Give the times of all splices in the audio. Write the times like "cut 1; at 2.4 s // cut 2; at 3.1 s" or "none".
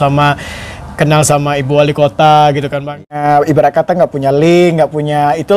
cut 1; at 3.1 s